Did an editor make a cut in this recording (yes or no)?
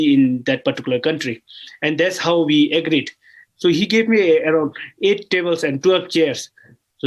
no